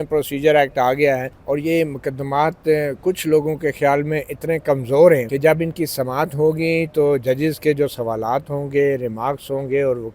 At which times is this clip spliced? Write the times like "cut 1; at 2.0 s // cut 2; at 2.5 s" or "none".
cut 1; at 1.3 s // cut 2; at 5.3 s

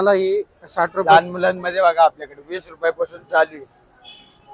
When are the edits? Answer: cut 1; at 1.0 s

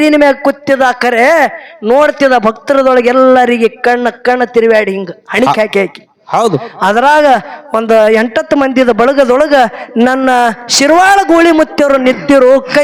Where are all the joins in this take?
none

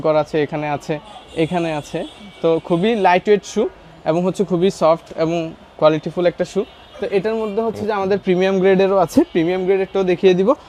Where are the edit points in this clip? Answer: none

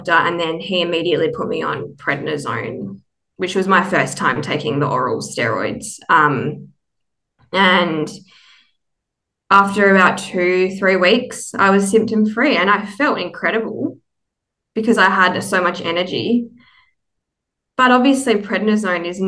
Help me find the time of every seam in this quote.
none

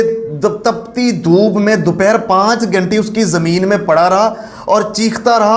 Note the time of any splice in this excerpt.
none

